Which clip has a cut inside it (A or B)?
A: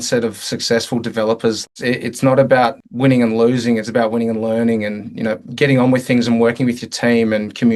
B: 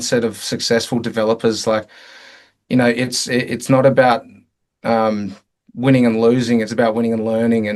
A